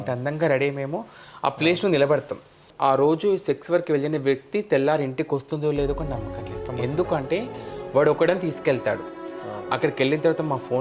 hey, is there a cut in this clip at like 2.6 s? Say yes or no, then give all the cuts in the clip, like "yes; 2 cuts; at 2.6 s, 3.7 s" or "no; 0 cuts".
yes; 1 cut; at 2.6 s